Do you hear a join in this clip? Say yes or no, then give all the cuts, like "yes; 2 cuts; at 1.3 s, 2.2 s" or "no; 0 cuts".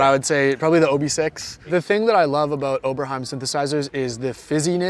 yes; 1 cut; at 1.7 s